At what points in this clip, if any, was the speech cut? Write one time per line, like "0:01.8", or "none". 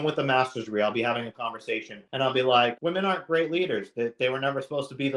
0:02.0
0:02.8